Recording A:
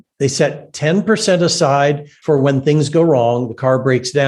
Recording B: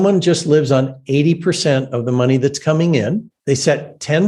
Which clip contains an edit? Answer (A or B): A